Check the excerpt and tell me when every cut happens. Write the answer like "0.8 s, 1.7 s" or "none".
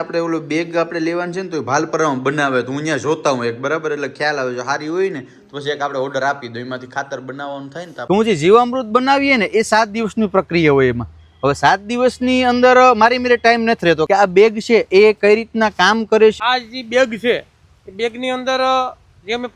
8.1 s, 14.0 s, 16.4 s